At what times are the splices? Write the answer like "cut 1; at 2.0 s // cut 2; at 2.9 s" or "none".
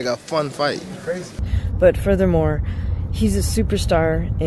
cut 1; at 1.4 s